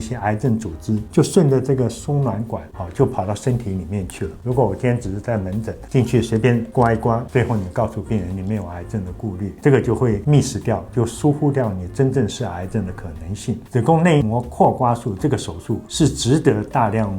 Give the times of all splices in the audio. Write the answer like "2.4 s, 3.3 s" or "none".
4.3 s, 7.2 s, 10.2 s, 13.6 s